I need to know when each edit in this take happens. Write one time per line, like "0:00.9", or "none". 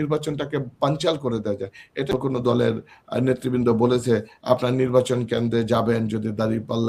0:02.1